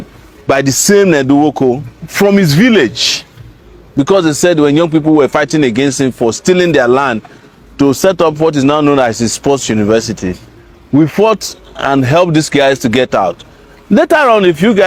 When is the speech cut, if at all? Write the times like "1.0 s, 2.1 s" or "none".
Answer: none